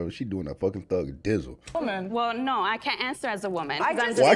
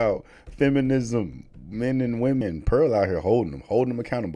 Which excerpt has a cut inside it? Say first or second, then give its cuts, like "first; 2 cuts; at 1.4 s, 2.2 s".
second; 1 cut; at 2.4 s